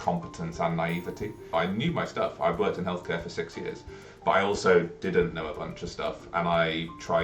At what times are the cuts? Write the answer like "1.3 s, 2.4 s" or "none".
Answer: 1.5 s

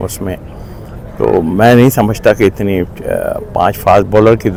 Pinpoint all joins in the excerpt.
none

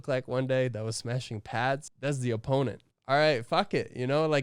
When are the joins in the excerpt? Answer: 1.9 s, 2.9 s

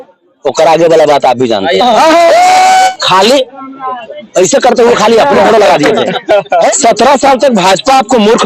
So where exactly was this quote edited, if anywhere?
2.9 s, 6.7 s

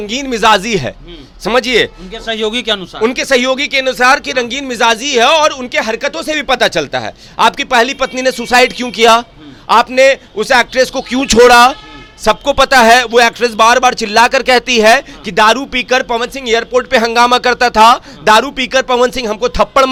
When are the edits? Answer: none

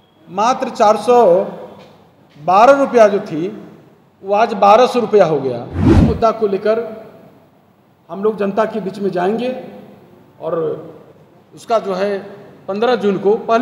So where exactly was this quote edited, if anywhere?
5.9 s

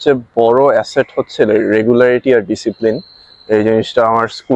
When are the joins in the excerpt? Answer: none

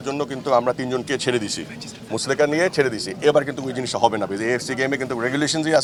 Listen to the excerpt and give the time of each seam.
none

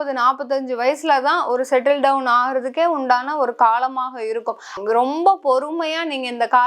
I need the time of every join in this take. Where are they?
4.7 s

